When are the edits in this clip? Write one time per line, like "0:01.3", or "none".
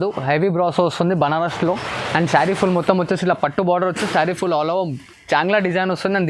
none